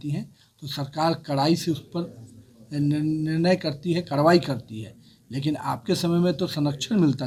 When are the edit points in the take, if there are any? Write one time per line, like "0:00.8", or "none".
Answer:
none